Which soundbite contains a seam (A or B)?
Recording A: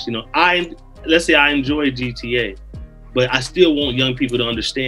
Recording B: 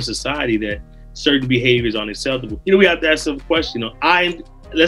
B